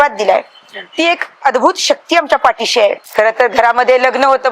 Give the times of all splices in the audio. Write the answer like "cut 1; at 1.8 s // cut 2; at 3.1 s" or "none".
cut 1; at 3.0 s